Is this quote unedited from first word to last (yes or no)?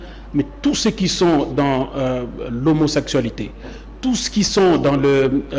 yes